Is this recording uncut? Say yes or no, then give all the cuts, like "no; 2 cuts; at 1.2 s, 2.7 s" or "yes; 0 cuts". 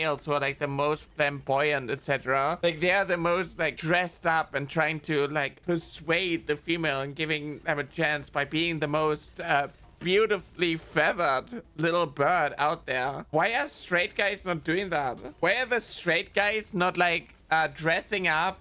yes; 0 cuts